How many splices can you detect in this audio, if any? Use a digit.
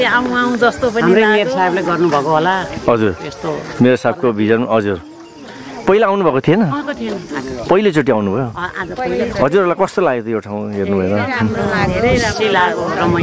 0